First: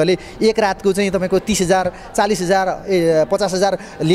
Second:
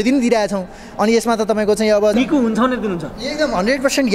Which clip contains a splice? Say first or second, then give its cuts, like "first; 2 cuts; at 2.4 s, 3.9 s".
second; 1 cut; at 2.1 s